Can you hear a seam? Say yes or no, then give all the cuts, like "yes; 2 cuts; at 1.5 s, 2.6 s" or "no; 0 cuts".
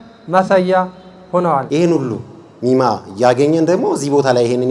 yes; 1 cut; at 1.7 s